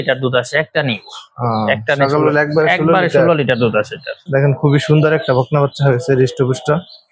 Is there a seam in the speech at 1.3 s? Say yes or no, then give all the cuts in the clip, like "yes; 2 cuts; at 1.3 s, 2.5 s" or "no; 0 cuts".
no; 1 cut; at 4.2 s